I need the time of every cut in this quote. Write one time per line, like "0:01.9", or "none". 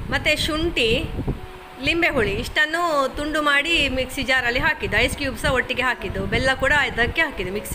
none